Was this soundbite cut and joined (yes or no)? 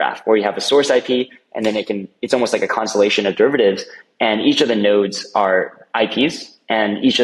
no